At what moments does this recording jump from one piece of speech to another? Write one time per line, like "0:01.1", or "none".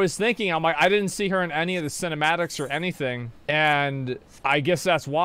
0:03.3
0:04.3